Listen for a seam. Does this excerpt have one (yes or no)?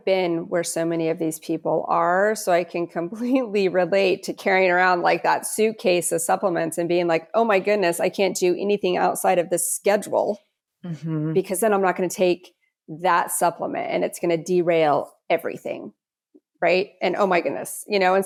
no